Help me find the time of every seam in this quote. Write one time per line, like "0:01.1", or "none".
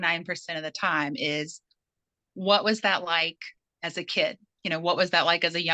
none